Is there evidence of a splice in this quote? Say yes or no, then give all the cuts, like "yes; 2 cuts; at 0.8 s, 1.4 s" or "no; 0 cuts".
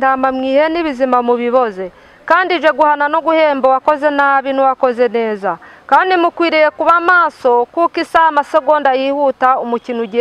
no; 0 cuts